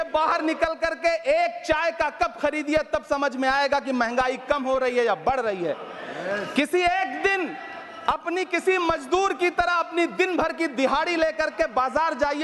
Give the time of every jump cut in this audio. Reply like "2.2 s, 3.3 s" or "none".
none